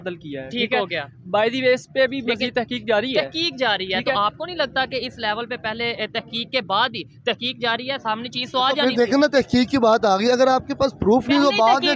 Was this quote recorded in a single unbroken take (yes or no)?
yes